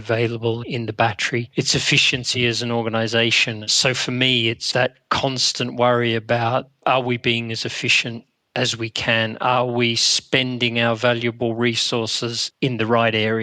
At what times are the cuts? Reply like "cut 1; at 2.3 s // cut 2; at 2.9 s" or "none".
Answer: cut 1; at 3.6 s // cut 2; at 12.4 s